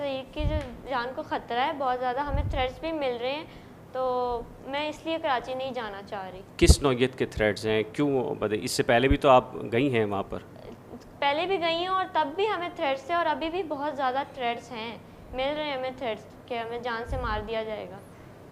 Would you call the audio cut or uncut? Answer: uncut